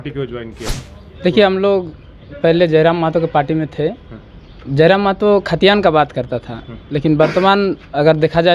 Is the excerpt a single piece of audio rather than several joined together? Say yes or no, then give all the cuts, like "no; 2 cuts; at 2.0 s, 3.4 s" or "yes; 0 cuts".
yes; 0 cuts